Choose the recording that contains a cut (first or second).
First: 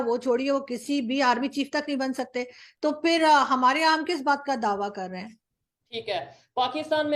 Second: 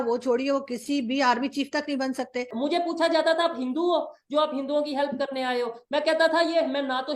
second